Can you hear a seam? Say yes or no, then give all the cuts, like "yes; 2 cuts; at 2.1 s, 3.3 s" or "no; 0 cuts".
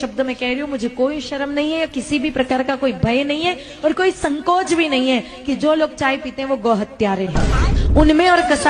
no; 0 cuts